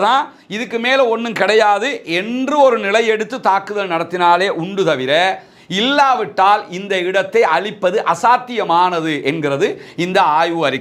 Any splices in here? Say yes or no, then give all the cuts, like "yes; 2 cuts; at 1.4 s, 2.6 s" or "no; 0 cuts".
no; 0 cuts